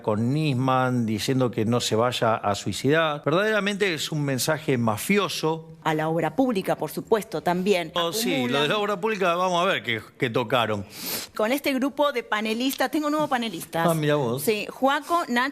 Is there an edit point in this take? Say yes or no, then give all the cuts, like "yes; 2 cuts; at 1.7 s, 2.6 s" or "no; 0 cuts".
yes; 4 cuts; at 3.2 s, 5.8 s, 8.0 s, 11.2 s